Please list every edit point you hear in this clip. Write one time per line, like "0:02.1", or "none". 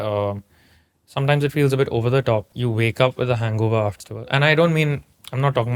0:02.5
0:04.1